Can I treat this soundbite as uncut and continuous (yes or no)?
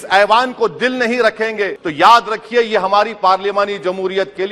no